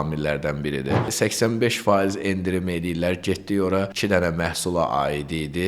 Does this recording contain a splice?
yes; 2 cuts; at 1.1 s, 3.9 s

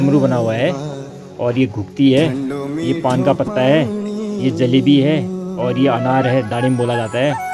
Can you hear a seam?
no; 0 cuts

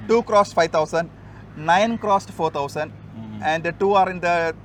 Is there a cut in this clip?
no; 0 cuts

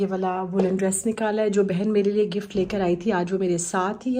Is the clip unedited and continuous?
yes; 0 cuts

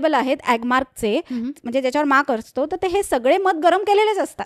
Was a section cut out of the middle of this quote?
no; 0 cuts

